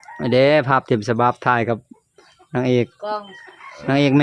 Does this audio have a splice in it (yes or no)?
no